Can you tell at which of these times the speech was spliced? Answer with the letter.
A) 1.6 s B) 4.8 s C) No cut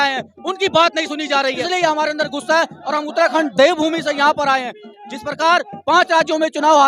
A